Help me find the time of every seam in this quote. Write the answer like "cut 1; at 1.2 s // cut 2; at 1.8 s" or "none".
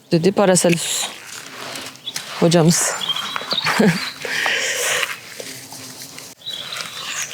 cut 1; at 6.4 s

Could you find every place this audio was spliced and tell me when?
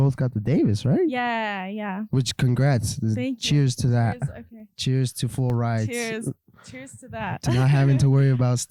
none

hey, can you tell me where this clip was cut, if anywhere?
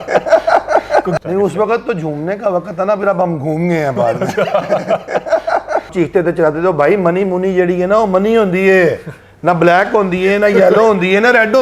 cut 1; at 1.1 s // cut 2; at 5.9 s

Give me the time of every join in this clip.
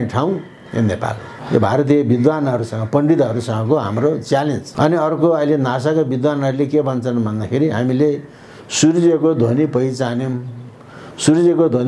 cut 1; at 1.3 s // cut 2; at 4.7 s

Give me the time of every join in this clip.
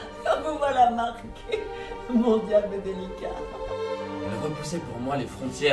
cut 1; at 4.3 s

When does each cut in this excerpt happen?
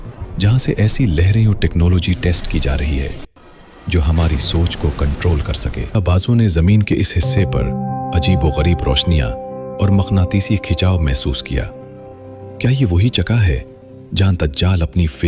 cut 1; at 6.0 s

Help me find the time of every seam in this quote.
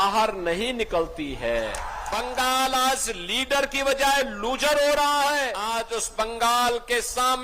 cut 1; at 2.2 s // cut 2; at 5.7 s

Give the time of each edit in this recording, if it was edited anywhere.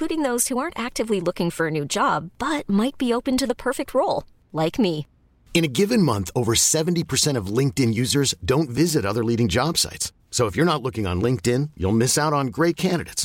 none

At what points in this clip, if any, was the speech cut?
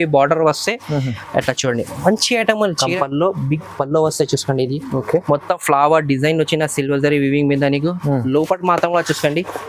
cut 1; at 2.9 s

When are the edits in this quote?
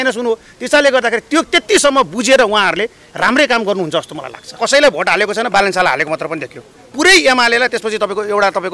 cut 1; at 4.6 s

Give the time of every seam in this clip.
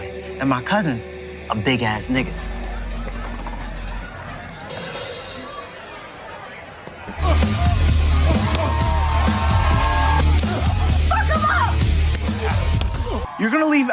cut 1; at 7.1 s

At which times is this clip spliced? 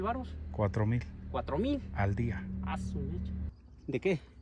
cut 1; at 3.5 s

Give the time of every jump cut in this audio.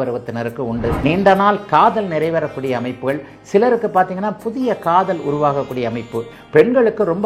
cut 1; at 1.0 s // cut 2; at 6.3 s

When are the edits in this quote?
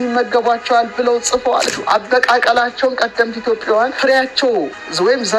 cut 1; at 1.7 s // cut 2; at 3.9 s

